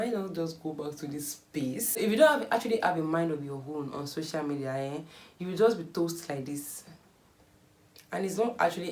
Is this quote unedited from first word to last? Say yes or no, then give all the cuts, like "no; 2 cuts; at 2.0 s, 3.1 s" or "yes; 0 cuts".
no; 1 cut; at 2.0 s